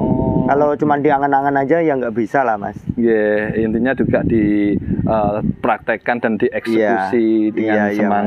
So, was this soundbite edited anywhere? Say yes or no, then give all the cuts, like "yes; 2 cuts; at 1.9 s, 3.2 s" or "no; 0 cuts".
no; 0 cuts